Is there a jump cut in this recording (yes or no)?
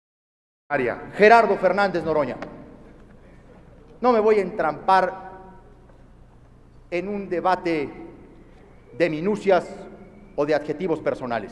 yes